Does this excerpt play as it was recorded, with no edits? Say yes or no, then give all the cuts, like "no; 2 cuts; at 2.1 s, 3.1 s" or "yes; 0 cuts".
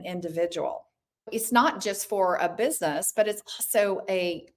no; 1 cut; at 1.3 s